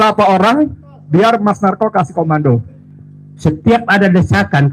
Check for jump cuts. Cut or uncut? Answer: cut